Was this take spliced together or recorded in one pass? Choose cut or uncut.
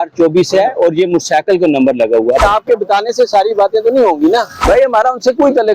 cut